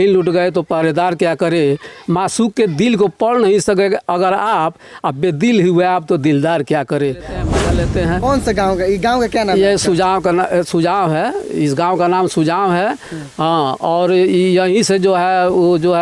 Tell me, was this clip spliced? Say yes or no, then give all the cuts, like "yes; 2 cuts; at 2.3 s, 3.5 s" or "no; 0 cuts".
yes; 1 cut; at 7.5 s